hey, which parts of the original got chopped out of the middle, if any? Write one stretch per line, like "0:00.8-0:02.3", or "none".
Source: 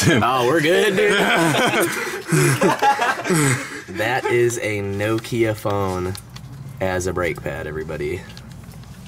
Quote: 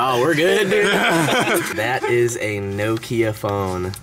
0:02.0-0:03.9

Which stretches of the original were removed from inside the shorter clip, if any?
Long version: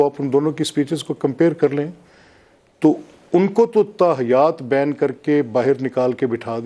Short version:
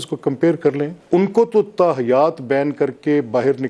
0:02.0-0:03.2

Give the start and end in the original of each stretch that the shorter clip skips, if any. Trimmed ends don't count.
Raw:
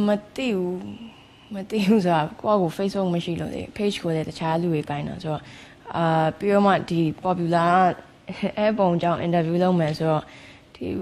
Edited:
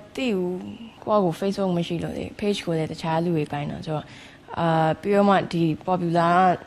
0:01.2-0:02.3

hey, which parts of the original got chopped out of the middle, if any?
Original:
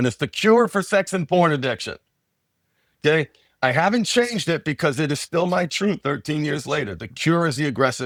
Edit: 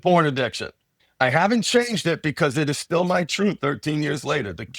0:02.3-0:03.4

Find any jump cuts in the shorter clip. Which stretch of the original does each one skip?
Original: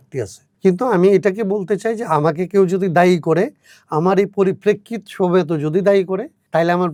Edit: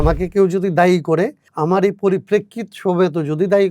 0:03.6-0:03.8

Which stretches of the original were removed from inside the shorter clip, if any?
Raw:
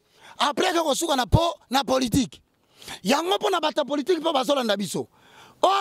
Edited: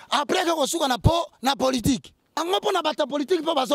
0:02.7-0:03.2

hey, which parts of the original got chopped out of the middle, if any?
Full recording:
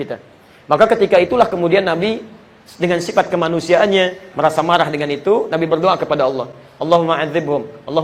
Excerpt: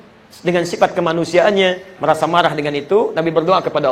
none

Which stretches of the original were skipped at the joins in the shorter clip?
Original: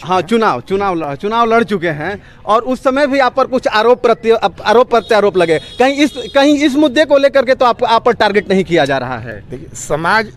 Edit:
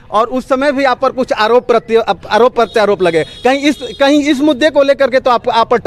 none

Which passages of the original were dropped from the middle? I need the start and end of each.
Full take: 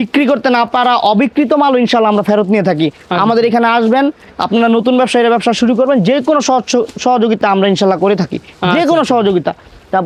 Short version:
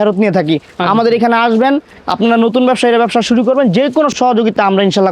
0:06.4-0:07.0

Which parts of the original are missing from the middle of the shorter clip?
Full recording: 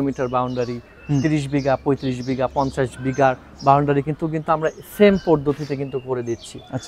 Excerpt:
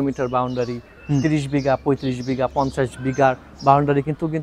none

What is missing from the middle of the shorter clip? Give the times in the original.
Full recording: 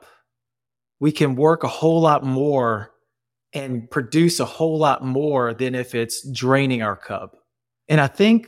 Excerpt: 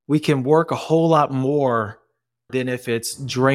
0:03.4-0:05.5

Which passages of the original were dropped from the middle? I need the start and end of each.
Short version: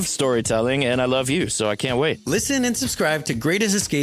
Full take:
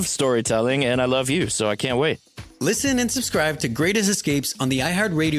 0:02.2-0:02.5

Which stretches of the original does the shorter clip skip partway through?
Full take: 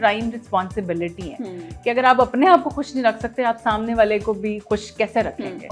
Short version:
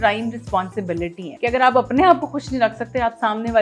0:01.2-0:01.7

